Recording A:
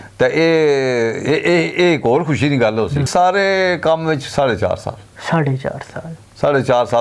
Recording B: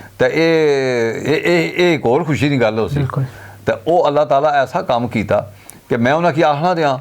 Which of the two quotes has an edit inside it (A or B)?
A